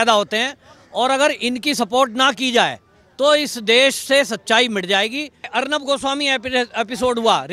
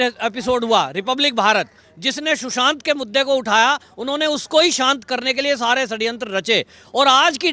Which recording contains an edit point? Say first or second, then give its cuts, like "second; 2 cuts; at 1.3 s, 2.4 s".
first; 1 cut; at 5.5 s